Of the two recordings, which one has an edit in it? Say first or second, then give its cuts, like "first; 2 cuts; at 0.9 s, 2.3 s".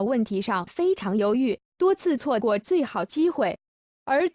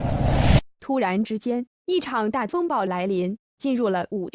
first; 1 cut; at 2.9 s